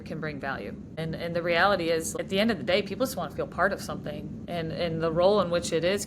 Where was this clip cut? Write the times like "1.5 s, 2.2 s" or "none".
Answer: 0.9 s, 2.1 s, 4.4 s